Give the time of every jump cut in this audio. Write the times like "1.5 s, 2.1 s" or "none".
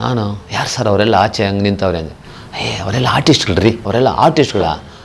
3.8 s

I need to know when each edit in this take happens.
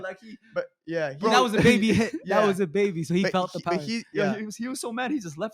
4.1 s

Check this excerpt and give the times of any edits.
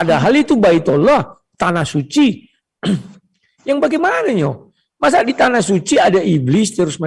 none

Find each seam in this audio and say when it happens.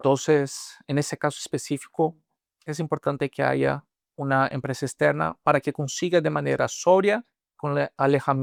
none

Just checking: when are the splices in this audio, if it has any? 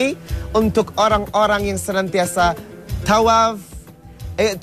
1.1 s

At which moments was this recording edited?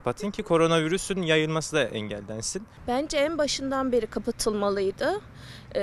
2.7 s

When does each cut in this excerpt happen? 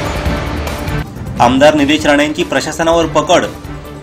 1.0 s

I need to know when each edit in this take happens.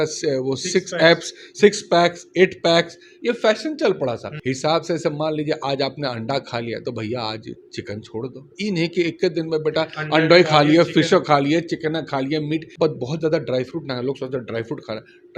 4.3 s, 8.5 s, 12.7 s

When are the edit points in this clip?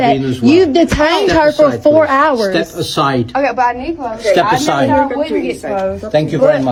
none

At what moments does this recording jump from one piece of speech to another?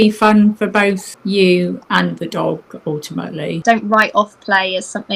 1.1 s, 3.6 s

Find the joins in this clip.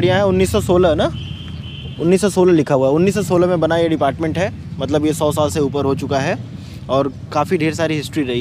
none

